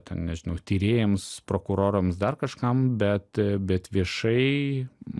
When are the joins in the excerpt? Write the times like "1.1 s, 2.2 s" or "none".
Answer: none